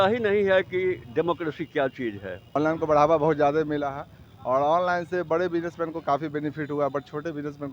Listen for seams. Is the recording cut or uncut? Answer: cut